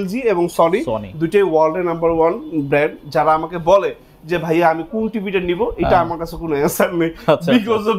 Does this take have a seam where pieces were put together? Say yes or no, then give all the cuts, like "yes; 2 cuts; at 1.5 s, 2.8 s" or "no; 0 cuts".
no; 0 cuts